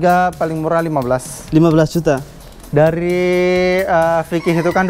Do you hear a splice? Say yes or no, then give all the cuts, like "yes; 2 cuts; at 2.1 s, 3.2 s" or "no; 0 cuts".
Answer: yes; 1 cut; at 2.6 s